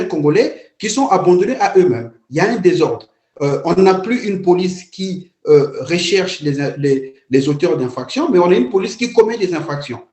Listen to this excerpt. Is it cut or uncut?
cut